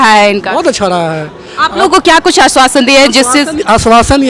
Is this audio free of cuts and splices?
yes; 0 cuts

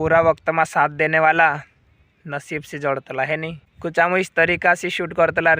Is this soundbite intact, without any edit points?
no; 1 cut; at 3.7 s

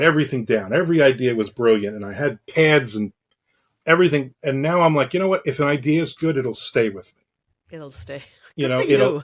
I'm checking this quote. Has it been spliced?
no; 0 cuts

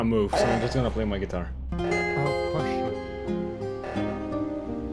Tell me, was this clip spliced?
no; 0 cuts

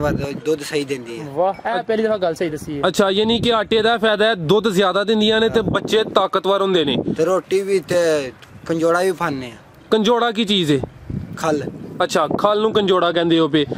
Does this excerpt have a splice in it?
no; 0 cuts

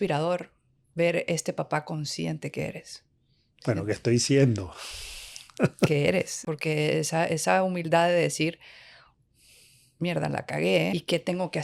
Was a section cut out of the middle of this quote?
yes; 2 cuts; at 6.4 s, 10.9 s

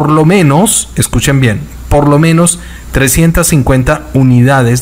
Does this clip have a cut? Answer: no; 0 cuts

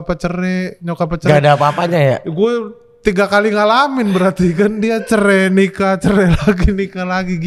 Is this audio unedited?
yes; 0 cuts

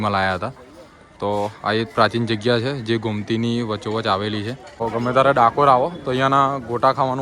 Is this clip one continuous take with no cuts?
no; 1 cut; at 4.8 s

